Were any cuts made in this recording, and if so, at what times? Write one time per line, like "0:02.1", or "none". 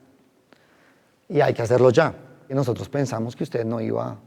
0:02.5